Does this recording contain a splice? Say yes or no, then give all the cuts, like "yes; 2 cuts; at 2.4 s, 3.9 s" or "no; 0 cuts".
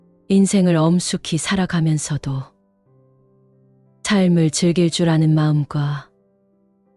yes; 1 cut; at 6.1 s